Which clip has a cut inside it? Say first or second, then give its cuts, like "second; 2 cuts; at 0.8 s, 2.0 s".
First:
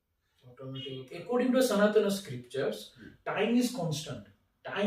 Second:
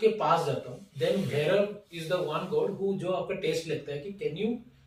first; 1 cut; at 1.1 s